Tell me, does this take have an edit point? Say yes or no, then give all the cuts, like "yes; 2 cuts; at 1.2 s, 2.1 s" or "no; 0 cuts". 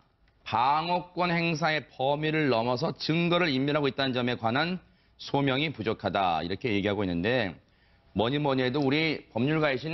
yes; 1 cut; at 2.7 s